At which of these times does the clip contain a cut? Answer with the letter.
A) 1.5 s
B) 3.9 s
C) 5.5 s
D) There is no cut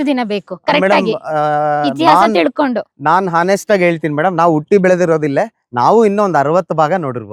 D